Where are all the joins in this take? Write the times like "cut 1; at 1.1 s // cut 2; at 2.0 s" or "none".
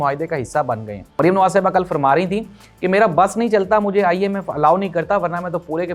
cut 1; at 1.2 s